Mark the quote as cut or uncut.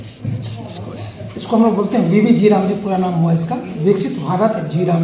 uncut